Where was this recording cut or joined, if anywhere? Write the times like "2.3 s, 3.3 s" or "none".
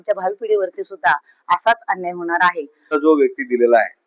2.7 s